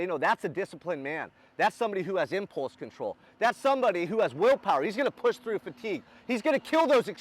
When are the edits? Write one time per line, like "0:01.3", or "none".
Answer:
none

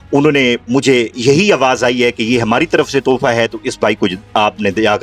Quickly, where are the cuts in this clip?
none

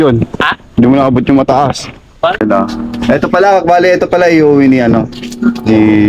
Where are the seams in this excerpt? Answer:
0:02.4

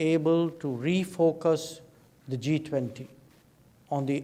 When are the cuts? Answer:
none

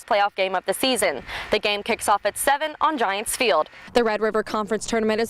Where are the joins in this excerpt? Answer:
0:03.9

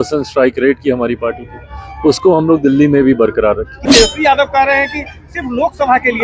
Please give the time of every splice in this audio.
0:03.9

